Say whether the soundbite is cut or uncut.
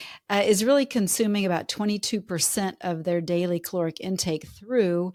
uncut